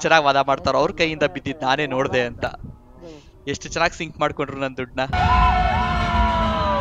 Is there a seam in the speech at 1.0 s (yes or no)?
no